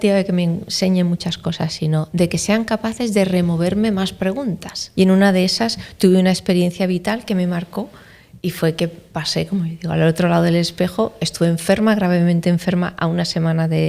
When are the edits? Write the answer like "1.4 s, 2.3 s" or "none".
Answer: 4.8 s